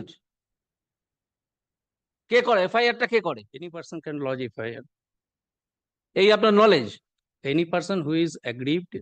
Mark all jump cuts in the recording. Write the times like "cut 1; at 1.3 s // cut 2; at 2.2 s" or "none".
none